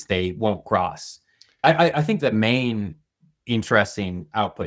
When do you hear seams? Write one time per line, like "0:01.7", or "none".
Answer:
0:01.5